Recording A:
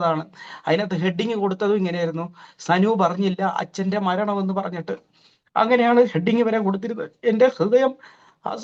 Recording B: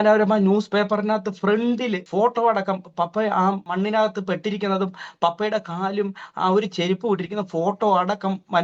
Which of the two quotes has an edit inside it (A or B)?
B